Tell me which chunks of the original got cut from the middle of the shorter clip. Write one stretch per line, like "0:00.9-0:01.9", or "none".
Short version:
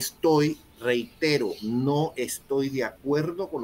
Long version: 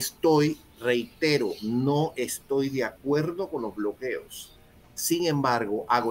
none